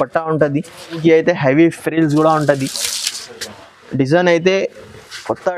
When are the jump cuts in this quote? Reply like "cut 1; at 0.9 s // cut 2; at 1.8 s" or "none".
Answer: cut 1; at 1.0 s